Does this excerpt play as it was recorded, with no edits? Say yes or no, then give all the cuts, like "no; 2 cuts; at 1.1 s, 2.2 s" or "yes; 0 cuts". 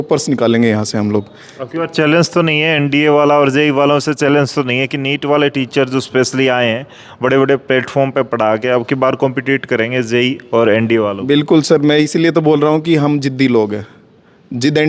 yes; 0 cuts